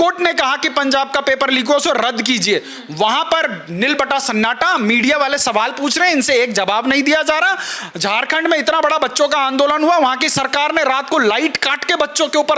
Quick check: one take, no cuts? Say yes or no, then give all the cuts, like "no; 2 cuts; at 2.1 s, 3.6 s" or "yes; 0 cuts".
yes; 0 cuts